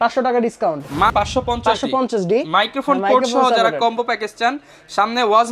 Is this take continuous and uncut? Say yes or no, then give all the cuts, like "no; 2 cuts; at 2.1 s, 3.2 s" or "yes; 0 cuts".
no; 1 cut; at 1.1 s